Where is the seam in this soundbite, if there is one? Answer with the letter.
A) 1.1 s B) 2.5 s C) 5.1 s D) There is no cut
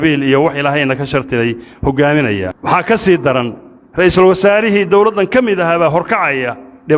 B